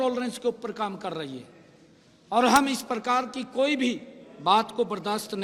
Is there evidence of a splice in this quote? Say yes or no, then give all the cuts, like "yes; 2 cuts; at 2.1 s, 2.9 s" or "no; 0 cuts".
no; 0 cuts